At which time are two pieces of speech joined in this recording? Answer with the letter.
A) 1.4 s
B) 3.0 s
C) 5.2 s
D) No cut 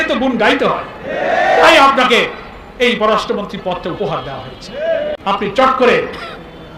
C